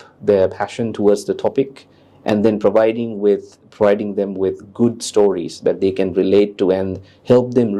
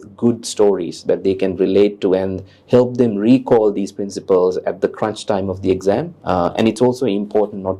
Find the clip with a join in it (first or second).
second